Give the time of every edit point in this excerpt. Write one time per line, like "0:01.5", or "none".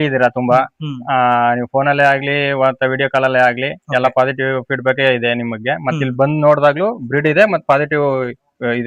none